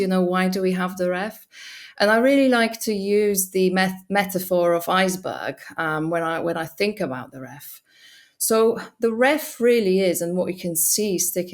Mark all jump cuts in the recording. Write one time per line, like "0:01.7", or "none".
none